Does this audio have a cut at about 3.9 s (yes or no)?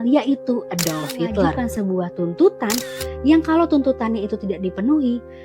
no